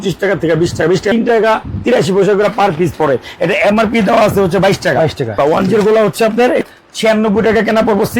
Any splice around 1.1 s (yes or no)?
yes